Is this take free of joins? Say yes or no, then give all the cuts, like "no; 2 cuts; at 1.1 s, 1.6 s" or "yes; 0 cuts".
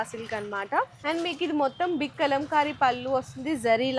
no; 1 cut; at 0.9 s